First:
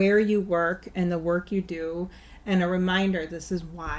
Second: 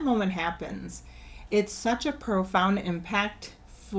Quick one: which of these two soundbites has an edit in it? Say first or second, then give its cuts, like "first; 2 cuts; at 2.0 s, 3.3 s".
second; 1 cut; at 1.4 s